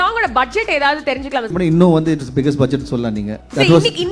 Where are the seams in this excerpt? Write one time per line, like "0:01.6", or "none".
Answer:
0:01.5